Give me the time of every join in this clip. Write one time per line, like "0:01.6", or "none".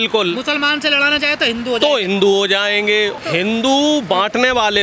0:03.2